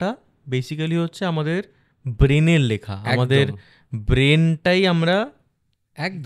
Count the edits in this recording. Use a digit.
0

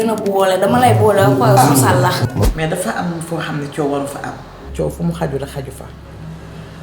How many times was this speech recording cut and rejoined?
1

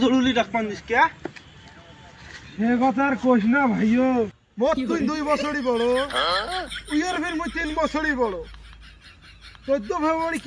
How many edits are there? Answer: 0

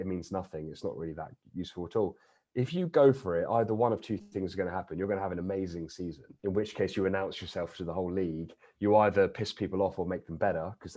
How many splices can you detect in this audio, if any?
1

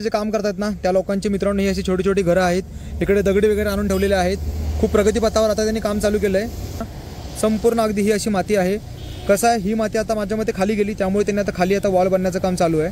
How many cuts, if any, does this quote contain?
1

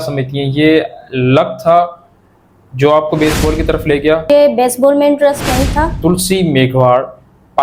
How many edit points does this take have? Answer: 2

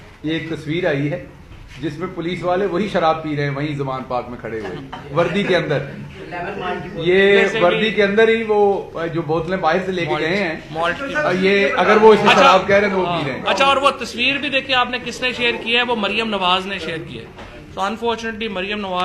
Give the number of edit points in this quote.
0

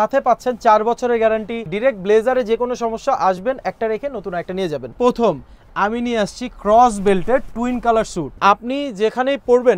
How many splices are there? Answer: 3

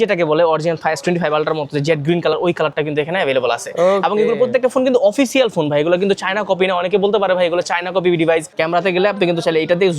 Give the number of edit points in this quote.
1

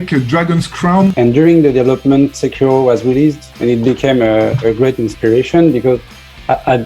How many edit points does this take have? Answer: 1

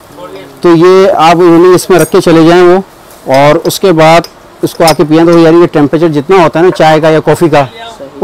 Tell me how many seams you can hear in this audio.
0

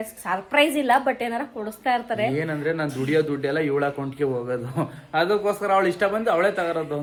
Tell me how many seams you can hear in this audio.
0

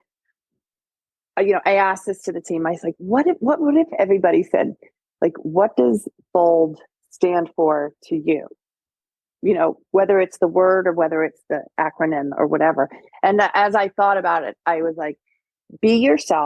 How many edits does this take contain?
0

